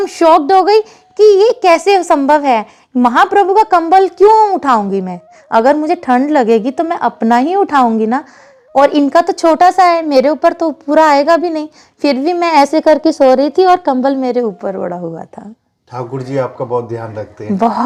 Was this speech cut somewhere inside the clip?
no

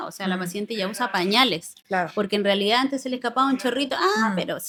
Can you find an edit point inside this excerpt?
no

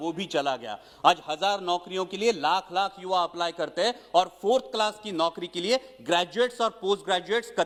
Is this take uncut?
yes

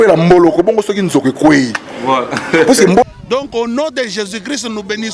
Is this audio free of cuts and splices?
no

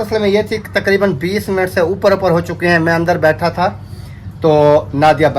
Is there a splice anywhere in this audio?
no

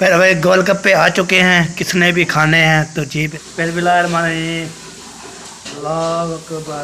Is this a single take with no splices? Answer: no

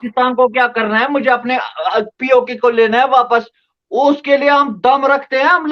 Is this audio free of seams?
yes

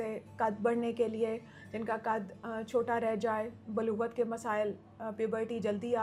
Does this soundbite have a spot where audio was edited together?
no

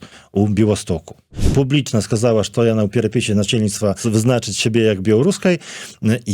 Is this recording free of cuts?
no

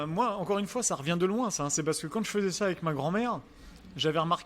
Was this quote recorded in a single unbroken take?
yes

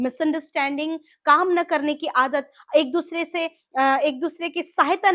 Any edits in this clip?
no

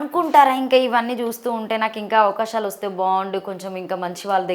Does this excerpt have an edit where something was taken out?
no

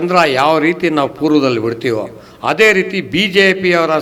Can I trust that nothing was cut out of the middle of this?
yes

